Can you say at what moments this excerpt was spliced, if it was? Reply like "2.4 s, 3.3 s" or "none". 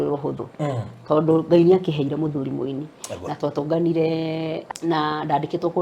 4.6 s